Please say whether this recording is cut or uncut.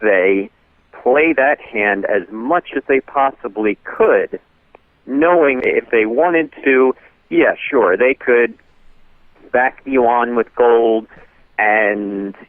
cut